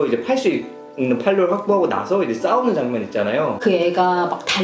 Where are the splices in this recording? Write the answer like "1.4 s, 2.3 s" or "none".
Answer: 3.6 s